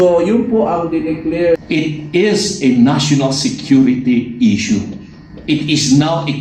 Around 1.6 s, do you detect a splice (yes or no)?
yes